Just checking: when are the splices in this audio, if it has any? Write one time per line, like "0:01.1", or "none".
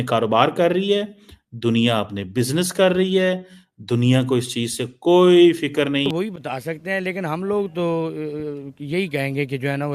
0:06.1